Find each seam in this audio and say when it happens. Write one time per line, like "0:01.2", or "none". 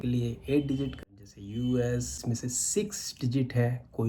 0:00.9
0:02.2